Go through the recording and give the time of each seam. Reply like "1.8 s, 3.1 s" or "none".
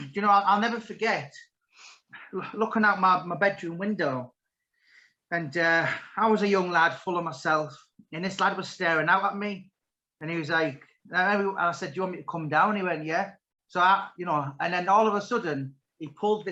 none